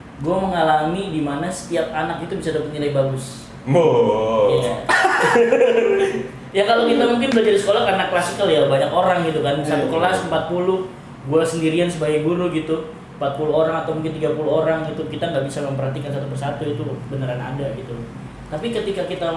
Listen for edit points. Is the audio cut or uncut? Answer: uncut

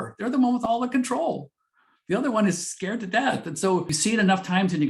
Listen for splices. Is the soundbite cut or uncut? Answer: cut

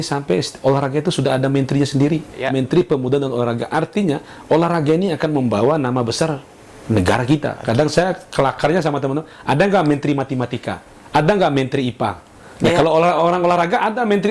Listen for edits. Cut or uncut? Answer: cut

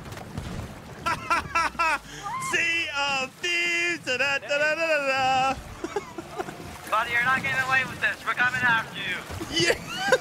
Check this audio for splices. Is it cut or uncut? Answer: cut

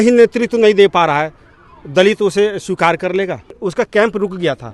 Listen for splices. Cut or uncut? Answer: cut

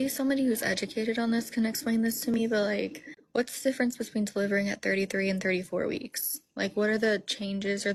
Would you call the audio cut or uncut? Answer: uncut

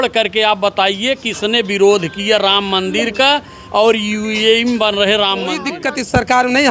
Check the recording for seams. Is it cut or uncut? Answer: cut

